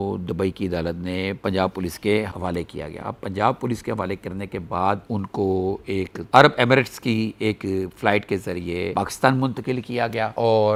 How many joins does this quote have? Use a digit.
0